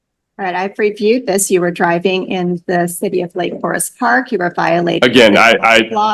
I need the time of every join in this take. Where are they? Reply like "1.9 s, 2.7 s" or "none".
none